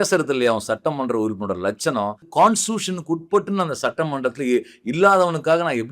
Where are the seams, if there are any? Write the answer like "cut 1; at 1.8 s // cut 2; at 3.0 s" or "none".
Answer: cut 1; at 2.2 s